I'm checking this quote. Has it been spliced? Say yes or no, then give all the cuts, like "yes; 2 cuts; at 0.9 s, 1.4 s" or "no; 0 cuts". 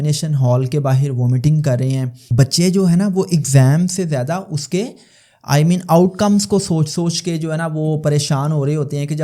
yes; 1 cut; at 2.2 s